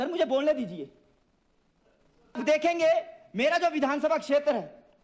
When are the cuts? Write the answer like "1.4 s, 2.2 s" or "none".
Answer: 2.4 s